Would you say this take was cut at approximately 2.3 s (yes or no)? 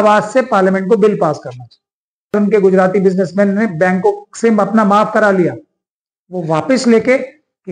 yes